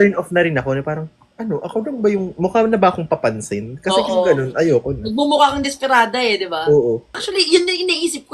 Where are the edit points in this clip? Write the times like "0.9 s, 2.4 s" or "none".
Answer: 7.2 s